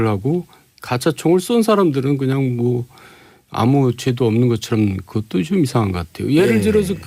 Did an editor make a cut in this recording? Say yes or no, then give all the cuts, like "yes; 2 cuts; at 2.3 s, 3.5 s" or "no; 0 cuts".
no; 0 cuts